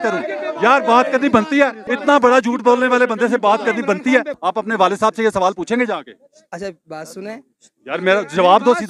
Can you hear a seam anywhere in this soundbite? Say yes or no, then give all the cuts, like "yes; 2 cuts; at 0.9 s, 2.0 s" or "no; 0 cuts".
yes; 2 cuts; at 1.9 s, 4.3 s